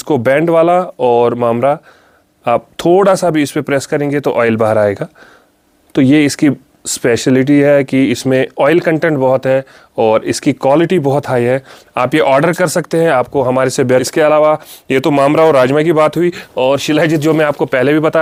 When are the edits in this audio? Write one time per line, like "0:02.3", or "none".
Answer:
none

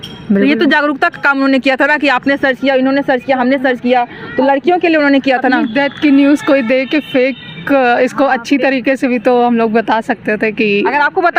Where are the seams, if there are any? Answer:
none

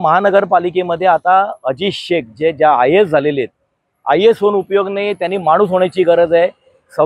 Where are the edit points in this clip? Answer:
none

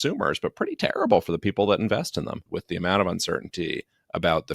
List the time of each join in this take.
0:02.5

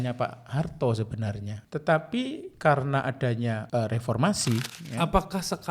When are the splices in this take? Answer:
0:01.5
0:03.6
0:04.8

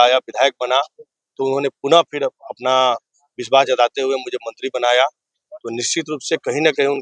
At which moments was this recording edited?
none

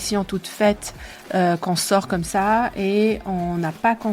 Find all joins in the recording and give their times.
none

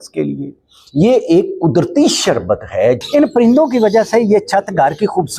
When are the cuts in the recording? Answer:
0:03.0

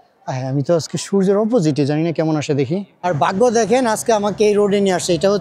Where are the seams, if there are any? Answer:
0:03.1

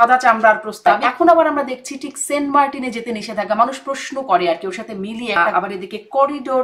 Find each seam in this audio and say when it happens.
0:00.9
0:05.4

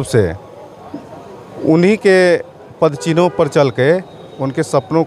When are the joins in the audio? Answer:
none

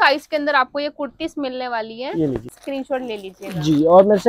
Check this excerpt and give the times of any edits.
0:02.5

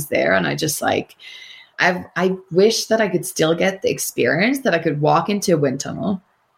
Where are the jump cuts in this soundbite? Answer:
0:01.7

